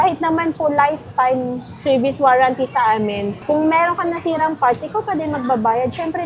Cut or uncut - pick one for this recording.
uncut